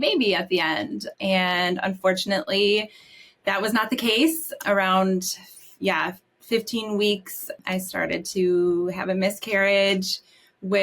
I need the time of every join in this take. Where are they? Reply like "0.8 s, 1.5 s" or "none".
1.1 s, 4.5 s, 7.6 s